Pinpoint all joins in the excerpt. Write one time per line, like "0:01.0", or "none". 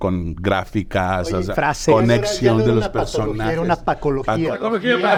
none